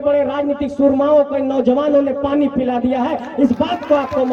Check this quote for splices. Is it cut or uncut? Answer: uncut